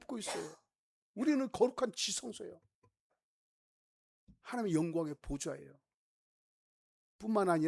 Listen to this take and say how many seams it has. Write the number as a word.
zero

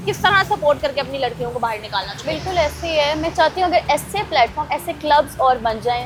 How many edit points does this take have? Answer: zero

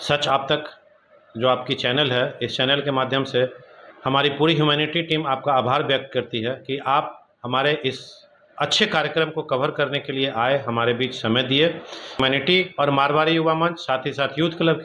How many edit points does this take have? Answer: one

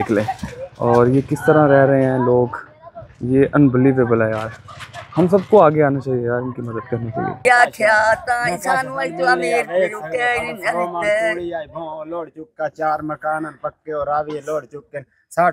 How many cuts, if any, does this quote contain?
one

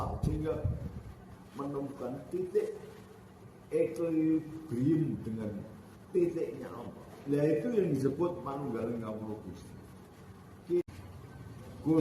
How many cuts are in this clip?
one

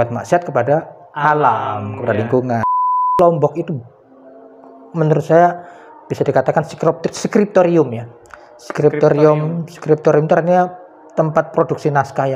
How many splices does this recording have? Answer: one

